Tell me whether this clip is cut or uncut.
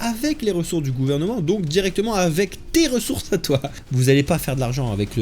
cut